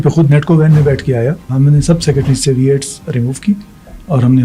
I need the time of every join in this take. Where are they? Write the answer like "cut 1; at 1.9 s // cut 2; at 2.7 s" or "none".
cut 1; at 1.5 s